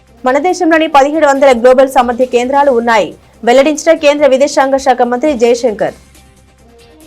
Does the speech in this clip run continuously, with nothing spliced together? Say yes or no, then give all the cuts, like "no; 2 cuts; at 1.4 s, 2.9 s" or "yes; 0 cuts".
no; 1 cut; at 6.0 s